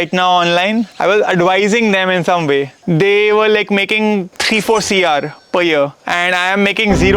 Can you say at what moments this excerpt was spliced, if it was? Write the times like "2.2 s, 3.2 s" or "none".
0.9 s, 2.7 s, 4.3 s, 6.0 s